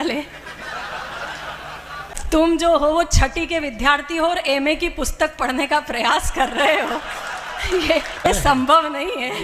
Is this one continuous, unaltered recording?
no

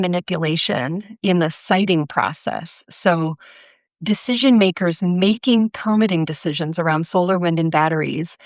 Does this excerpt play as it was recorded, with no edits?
yes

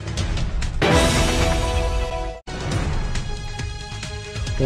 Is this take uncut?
yes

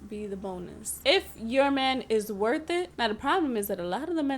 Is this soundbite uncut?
no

